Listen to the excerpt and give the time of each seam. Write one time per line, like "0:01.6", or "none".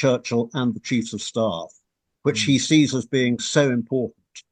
none